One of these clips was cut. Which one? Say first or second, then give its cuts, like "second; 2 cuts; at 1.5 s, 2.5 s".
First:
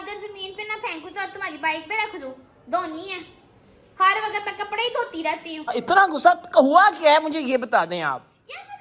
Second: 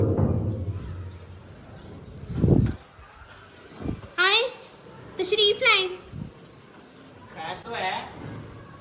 first; 1 cut; at 5.8 s